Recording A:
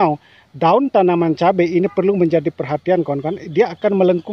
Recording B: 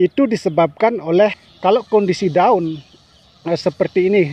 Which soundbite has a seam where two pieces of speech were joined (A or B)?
B